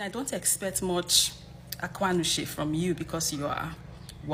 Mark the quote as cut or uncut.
uncut